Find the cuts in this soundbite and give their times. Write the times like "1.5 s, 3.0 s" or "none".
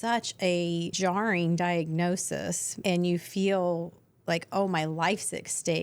0.9 s, 2.7 s